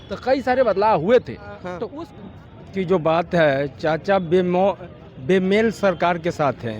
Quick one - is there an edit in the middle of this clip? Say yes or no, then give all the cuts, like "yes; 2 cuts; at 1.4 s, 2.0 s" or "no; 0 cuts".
yes; 1 cut; at 1.7 s